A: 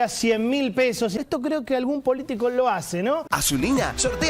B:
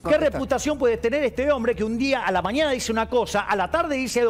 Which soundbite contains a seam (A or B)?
A